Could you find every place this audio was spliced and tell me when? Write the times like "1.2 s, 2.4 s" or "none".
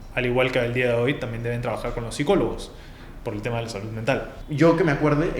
4.4 s